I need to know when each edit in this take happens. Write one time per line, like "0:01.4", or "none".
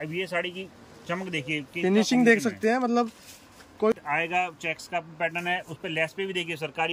0:03.9

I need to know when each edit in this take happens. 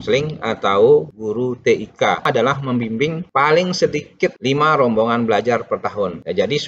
0:02.3

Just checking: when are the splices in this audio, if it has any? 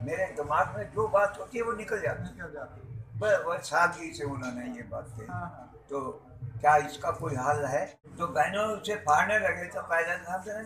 0:08.0

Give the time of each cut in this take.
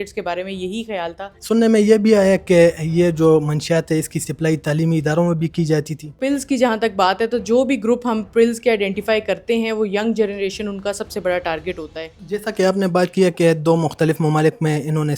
0:01.3
0:06.2
0:12.1

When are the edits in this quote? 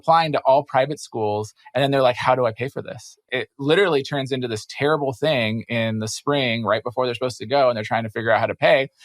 0:03.1

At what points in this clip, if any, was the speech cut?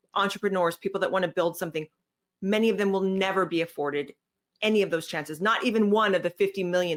none

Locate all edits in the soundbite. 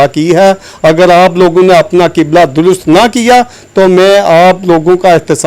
none

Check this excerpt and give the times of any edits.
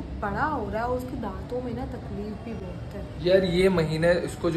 none

